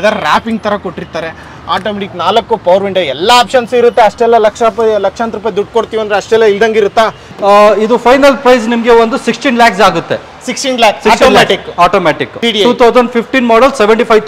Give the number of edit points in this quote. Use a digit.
2